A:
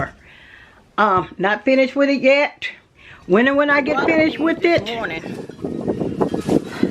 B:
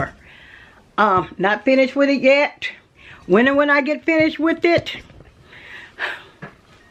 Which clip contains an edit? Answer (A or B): A